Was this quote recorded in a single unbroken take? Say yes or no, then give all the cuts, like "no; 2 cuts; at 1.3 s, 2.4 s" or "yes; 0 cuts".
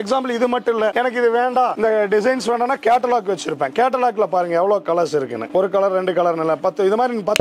yes; 0 cuts